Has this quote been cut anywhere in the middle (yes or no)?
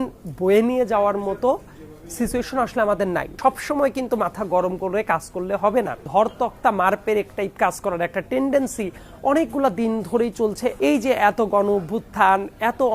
yes